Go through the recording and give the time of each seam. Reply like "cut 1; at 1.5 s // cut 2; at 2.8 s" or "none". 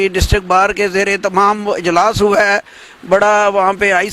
none

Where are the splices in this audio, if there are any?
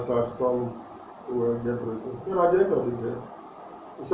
none

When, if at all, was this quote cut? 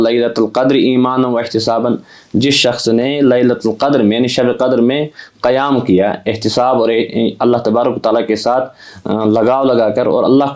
none

